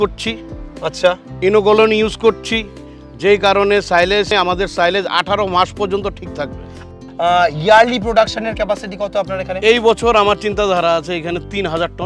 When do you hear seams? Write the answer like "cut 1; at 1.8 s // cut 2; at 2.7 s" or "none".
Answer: cut 1; at 4.3 s // cut 2; at 6.9 s